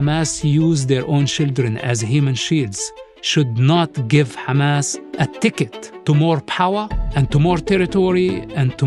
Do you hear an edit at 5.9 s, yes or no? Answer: yes